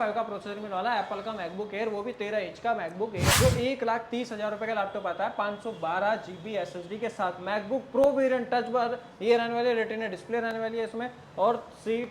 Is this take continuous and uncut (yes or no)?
no